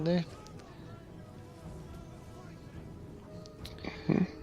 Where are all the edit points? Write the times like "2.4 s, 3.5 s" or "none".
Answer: 3.1 s